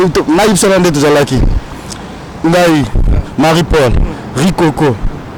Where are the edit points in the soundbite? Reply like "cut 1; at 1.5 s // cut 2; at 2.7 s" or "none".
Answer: none